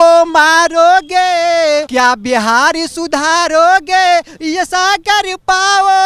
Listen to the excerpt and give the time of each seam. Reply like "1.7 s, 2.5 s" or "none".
1.9 s